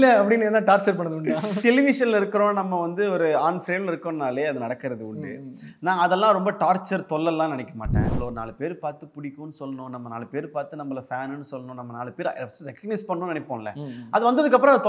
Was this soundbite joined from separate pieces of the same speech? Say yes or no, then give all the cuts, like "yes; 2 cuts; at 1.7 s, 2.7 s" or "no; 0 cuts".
yes; 2 cuts; at 1.5 s, 8.0 s